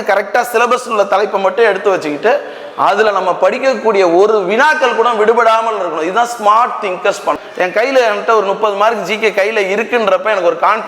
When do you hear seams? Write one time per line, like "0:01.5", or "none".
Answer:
0:07.4